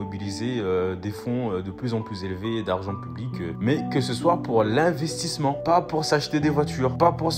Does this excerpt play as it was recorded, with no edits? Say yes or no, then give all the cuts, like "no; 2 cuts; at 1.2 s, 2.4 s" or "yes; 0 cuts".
yes; 0 cuts